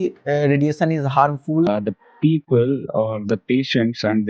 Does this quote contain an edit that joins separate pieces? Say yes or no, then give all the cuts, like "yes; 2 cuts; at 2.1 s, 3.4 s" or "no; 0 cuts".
yes; 1 cut; at 1.7 s